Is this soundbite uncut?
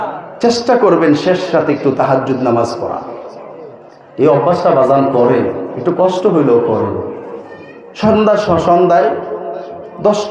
yes; 0 cuts

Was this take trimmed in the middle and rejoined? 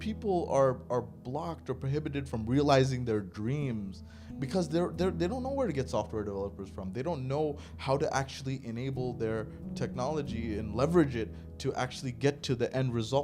no; 0 cuts

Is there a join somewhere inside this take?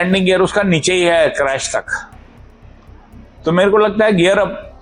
no; 0 cuts

